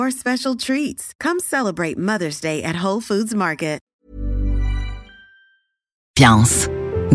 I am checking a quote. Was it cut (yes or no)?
yes